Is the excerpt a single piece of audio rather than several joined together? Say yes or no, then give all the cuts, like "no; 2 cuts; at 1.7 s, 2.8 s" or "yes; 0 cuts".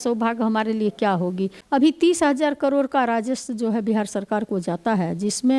no; 1 cut; at 1.6 s